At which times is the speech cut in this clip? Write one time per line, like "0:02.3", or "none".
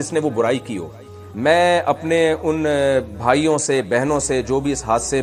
0:01.3